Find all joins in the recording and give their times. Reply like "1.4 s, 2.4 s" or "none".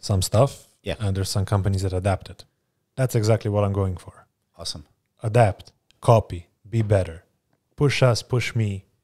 none